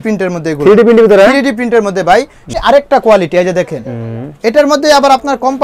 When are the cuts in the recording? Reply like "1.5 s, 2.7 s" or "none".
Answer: 2.5 s